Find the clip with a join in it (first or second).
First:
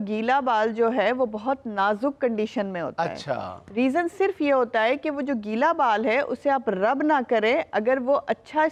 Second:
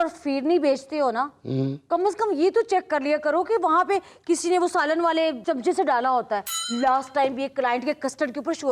second